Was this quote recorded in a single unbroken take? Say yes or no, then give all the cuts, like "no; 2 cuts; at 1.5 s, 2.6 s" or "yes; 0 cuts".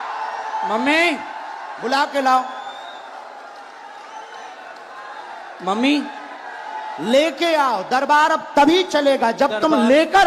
yes; 0 cuts